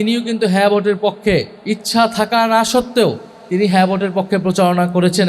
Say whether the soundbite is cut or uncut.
cut